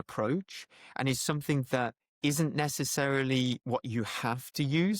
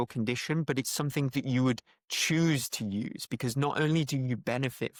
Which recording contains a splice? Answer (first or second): first